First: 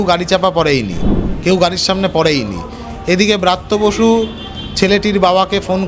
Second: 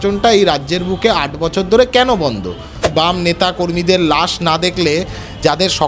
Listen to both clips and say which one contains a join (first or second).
second